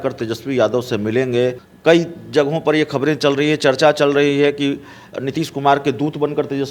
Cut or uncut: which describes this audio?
cut